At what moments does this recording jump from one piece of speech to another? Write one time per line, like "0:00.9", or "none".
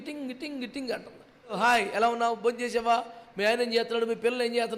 0:01.5